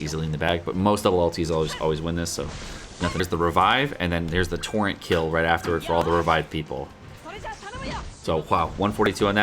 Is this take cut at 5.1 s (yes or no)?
no